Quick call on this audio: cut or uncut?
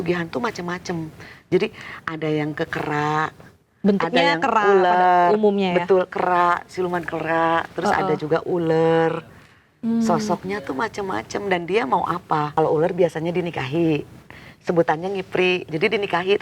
cut